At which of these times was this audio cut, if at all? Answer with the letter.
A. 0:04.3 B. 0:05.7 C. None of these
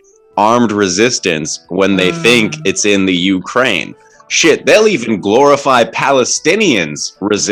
C